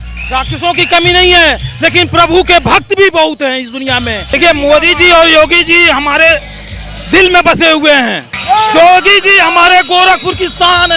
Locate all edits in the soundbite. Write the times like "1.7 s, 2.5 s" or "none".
4.3 s, 8.3 s